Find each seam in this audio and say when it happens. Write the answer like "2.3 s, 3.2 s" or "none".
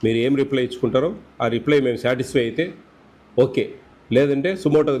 none